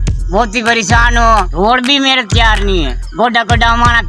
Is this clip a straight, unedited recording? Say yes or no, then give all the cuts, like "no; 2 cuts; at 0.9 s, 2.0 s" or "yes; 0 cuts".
no; 2 cuts; at 1.5 s, 3.0 s